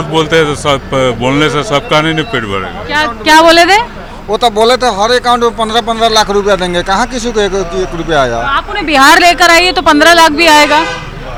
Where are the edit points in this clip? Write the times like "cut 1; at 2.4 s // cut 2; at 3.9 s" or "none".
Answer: none